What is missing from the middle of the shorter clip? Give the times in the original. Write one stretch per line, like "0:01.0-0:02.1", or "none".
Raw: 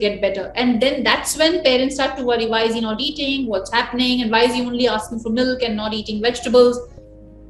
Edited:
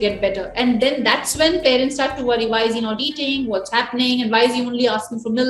none